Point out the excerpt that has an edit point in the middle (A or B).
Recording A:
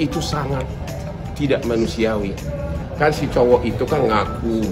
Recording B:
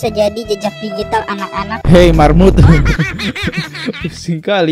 A